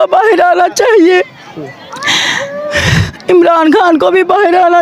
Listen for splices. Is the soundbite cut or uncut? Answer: uncut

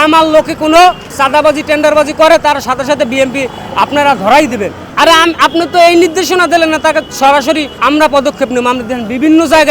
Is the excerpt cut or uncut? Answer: cut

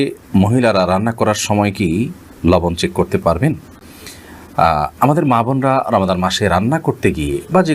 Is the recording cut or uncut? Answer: uncut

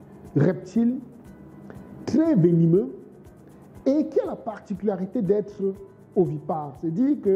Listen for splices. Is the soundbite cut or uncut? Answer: uncut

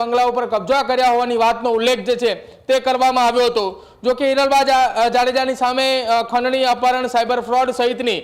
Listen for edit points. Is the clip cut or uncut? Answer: uncut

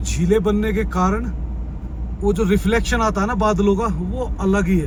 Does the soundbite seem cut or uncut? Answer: uncut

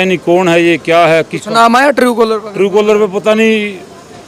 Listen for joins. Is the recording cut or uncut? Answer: uncut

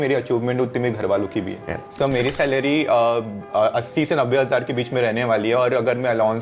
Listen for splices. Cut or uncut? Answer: cut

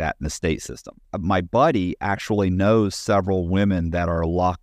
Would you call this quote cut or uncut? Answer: cut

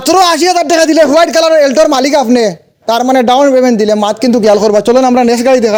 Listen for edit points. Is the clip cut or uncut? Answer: uncut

